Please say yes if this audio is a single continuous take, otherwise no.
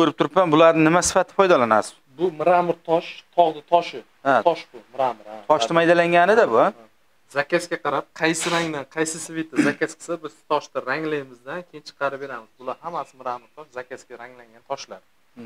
yes